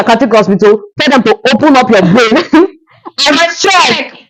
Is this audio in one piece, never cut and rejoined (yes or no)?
yes